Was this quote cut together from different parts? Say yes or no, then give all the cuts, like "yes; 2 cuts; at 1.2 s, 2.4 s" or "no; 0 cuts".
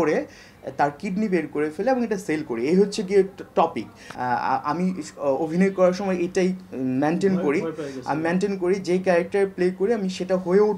no; 0 cuts